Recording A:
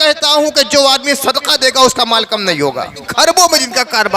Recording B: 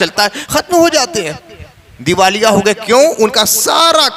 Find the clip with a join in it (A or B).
A